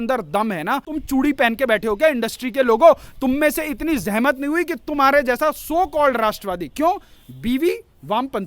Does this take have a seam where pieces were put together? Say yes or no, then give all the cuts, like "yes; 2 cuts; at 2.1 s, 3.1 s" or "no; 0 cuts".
yes; 1 cut; at 0.9 s